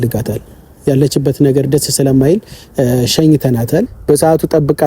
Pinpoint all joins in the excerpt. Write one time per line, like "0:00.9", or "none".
0:03.9